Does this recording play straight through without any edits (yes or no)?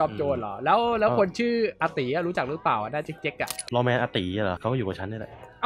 no